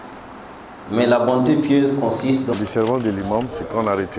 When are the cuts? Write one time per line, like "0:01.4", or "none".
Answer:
0:02.5